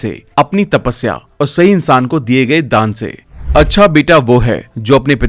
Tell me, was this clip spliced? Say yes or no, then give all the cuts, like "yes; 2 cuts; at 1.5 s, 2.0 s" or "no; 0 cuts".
yes; 1 cut; at 3.3 s